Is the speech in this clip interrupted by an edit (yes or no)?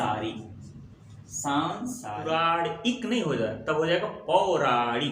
yes